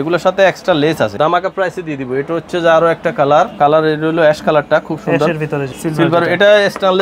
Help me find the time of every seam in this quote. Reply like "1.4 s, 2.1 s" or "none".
1.1 s, 3.5 s, 5.7 s